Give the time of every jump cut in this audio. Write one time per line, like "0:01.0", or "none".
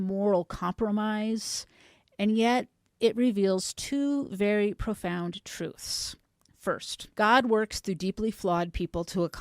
0:07.0